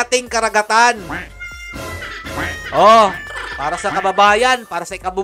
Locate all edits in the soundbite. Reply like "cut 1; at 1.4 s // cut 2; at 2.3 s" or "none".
none